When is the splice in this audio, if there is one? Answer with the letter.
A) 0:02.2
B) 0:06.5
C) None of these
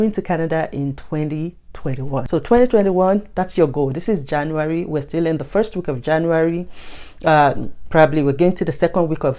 A